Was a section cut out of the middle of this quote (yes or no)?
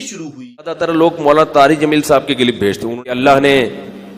yes